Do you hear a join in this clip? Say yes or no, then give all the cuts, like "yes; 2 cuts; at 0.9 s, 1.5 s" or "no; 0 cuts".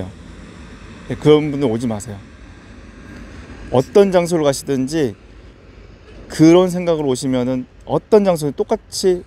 no; 0 cuts